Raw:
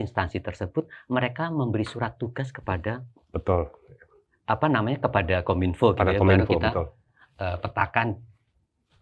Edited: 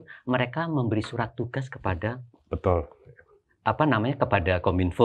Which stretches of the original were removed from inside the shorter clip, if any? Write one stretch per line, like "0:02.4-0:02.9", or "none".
none